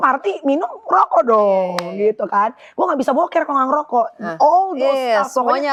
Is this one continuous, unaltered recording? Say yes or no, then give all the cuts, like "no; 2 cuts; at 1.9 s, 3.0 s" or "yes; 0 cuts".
yes; 0 cuts